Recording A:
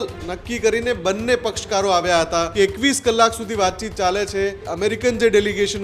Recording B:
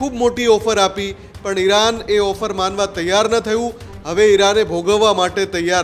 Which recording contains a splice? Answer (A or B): A